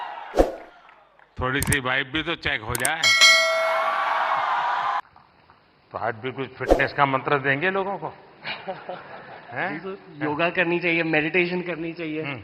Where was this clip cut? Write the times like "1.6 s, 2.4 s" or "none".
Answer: 5.0 s

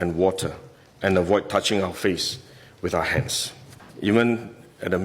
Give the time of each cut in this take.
3.8 s

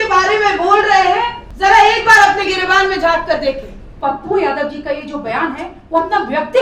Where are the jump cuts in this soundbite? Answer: 1.4 s, 4.0 s

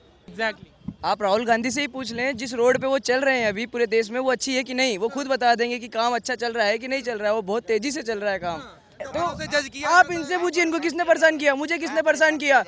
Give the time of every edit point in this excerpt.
9.0 s

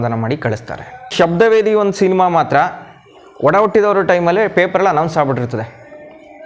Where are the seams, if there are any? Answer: 1.1 s

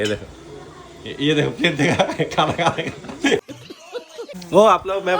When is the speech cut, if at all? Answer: 4.3 s

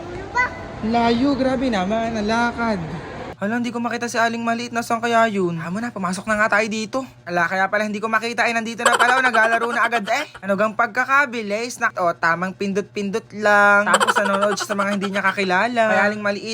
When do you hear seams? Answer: 3.3 s, 11.9 s

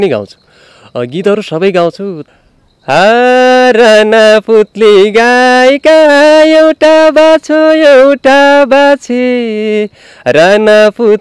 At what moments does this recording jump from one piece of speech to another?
2.2 s

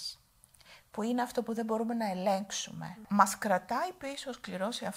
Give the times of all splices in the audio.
3.0 s

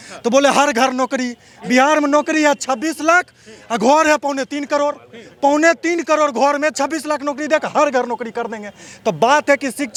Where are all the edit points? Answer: none

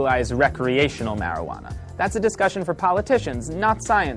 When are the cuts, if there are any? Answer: none

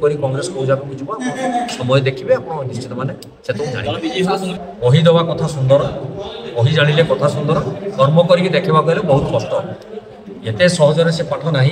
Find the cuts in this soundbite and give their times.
4.6 s

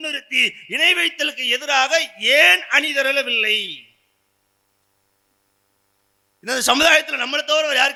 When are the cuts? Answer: none

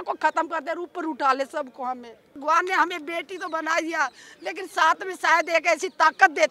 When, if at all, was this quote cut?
2.4 s

